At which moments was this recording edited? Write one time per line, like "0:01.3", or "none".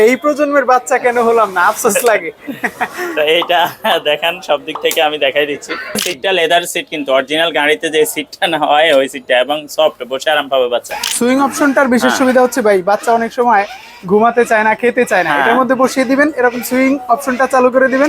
0:06.1
0:11.0